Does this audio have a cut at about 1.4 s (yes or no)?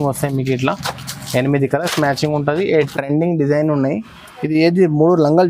no